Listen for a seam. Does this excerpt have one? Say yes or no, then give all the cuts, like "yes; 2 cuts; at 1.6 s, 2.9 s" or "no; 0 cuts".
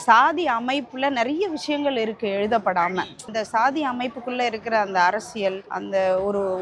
yes; 2 cuts; at 3.3 s, 5.7 s